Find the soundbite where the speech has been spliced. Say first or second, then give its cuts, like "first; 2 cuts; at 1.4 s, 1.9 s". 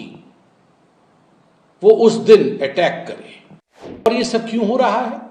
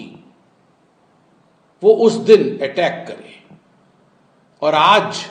first; 1 cut; at 4.1 s